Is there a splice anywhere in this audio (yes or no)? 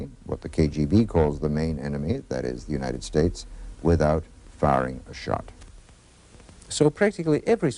no